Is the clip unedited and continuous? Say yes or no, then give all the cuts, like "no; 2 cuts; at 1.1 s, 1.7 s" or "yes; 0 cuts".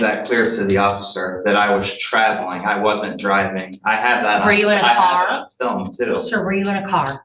yes; 0 cuts